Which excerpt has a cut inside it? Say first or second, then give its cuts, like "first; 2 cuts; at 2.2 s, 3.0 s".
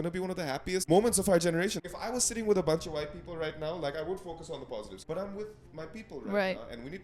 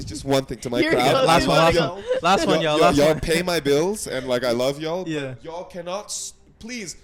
first; 3 cuts; at 0.8 s, 1.8 s, 5.0 s